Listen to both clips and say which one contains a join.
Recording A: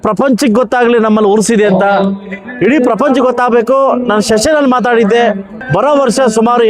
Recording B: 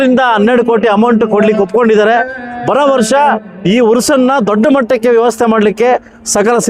A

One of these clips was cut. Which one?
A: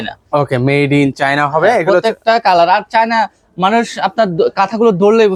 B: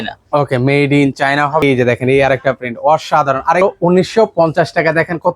B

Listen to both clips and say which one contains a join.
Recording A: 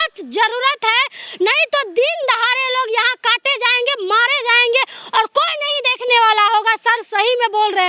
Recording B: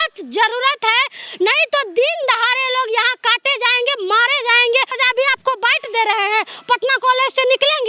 B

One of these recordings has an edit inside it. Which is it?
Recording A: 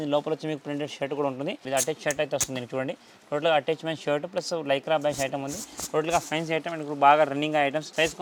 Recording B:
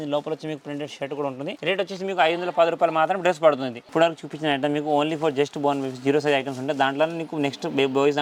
B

